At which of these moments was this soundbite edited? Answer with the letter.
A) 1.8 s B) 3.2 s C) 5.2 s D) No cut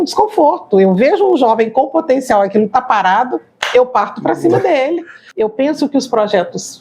C